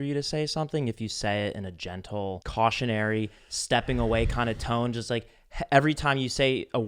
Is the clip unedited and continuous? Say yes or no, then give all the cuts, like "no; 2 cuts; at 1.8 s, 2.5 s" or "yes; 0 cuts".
no; 1 cut; at 2.4 s